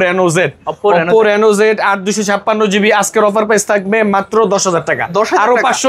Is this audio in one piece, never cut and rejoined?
yes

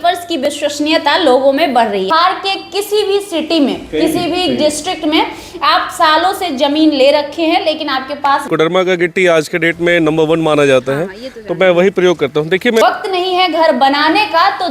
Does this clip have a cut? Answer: yes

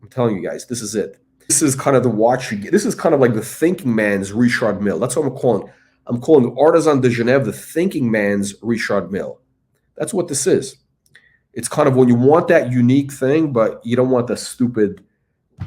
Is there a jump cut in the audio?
yes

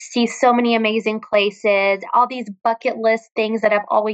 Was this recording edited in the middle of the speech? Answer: no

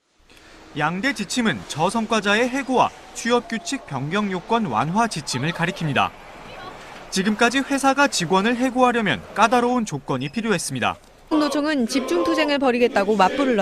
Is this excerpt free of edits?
yes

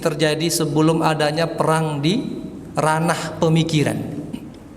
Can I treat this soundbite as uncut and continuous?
yes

